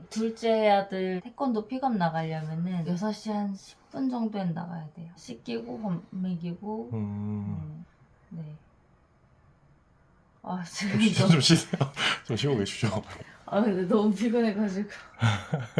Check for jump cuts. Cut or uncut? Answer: cut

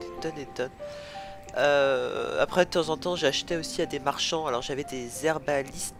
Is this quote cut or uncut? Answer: uncut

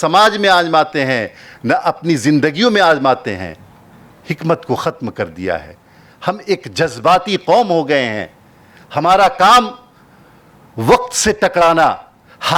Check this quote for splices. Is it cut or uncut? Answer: uncut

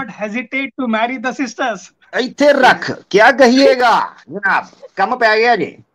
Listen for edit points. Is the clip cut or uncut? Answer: cut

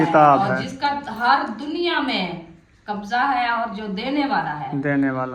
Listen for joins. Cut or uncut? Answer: uncut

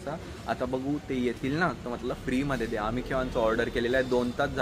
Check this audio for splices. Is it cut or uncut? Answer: uncut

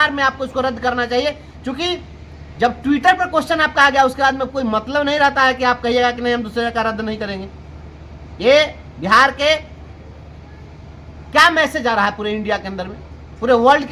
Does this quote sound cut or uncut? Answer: uncut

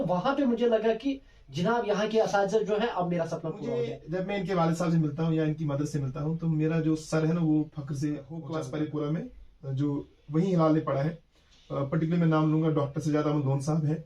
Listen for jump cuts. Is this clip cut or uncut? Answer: cut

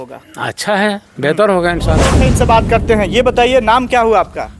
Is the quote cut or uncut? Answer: cut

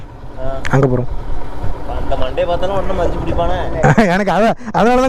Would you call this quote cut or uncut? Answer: uncut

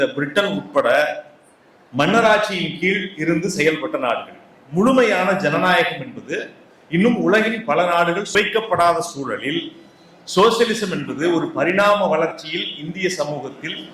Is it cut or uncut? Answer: cut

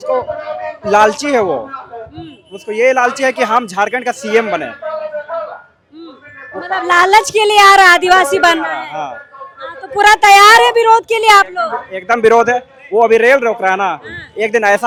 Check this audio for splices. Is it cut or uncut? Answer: uncut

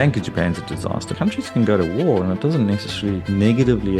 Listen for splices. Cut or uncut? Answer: cut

